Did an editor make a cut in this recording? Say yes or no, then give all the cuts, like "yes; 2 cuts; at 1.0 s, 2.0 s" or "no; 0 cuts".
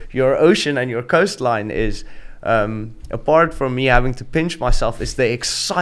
no; 0 cuts